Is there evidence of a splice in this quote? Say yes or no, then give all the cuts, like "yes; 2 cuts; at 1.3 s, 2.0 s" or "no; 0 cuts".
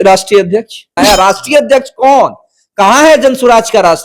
yes; 1 cut; at 1.0 s